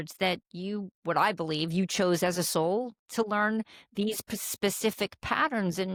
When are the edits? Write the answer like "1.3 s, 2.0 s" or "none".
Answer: none